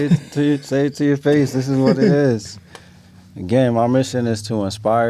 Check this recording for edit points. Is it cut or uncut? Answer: uncut